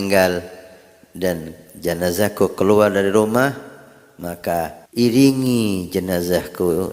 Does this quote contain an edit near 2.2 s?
no; 1 cut; at 4.8 s

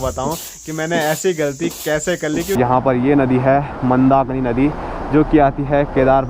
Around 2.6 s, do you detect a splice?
yes; 1 cut; at 2.6 s

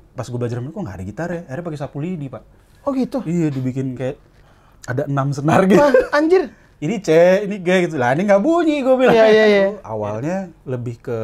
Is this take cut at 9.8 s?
yes; 1 cut; at 9.8 s

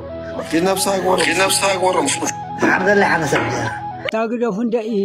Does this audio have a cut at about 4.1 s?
yes; 1 cut; at 4.1 s

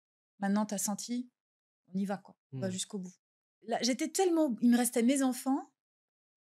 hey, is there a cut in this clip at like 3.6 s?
yes; 1 cut; at 3.6 s

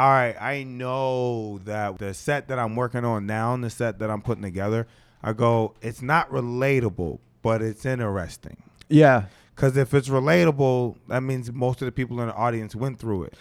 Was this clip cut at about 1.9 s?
yes; 1 cut; at 1.9 s

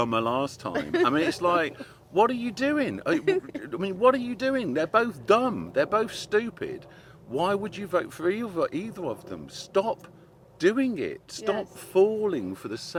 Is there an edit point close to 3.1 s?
no; 0 cuts

